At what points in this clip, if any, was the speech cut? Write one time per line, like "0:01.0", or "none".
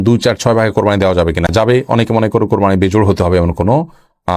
none

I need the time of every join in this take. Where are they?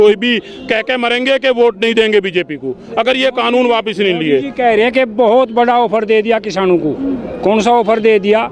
none

